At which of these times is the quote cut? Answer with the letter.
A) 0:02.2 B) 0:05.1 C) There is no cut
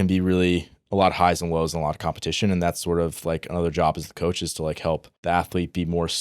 B